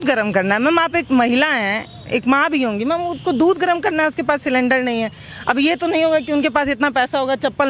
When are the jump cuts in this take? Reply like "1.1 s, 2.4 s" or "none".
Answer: none